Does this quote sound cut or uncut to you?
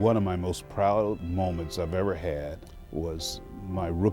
cut